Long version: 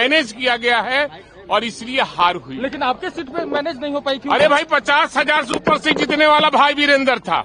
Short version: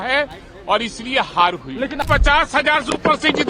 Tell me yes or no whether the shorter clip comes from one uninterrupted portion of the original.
no